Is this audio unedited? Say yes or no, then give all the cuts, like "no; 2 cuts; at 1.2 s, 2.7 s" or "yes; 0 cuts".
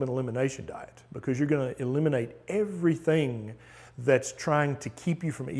yes; 0 cuts